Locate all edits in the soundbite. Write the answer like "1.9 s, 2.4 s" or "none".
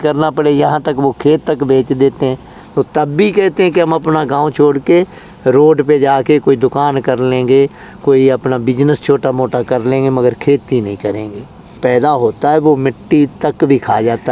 2.6 s, 11.8 s